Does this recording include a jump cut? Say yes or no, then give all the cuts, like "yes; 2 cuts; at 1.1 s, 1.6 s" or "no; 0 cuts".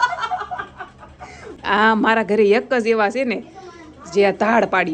yes; 1 cut; at 1.5 s